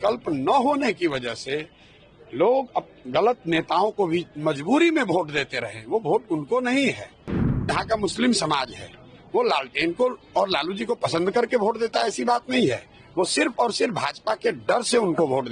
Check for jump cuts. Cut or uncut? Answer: uncut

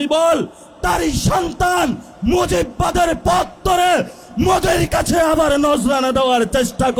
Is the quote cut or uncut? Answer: uncut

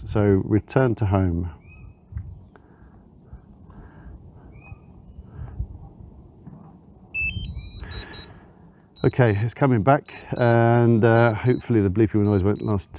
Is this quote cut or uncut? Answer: uncut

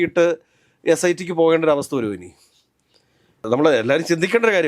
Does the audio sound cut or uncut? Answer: uncut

